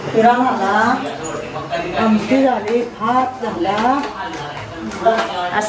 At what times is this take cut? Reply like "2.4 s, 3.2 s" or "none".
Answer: none